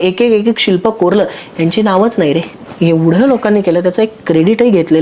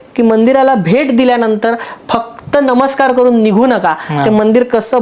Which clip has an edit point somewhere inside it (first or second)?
first